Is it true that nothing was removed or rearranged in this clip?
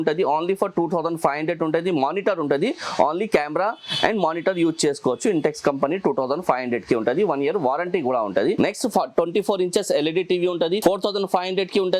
yes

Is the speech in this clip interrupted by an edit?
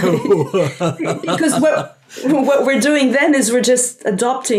no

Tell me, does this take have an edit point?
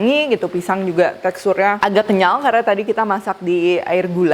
yes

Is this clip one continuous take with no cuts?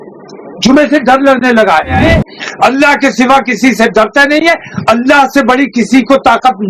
no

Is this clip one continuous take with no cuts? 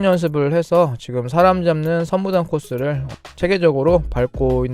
yes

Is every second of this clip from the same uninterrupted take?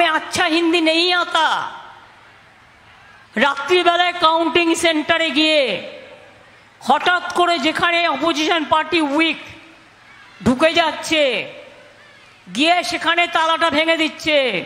no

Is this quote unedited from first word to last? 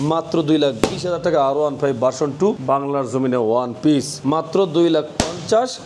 no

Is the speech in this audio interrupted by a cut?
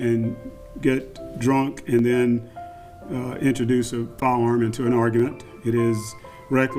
no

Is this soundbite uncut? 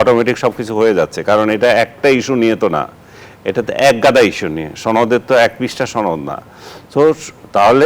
yes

